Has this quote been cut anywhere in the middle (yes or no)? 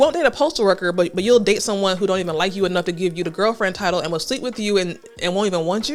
no